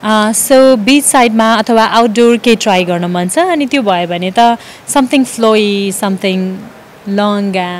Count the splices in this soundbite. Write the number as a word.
zero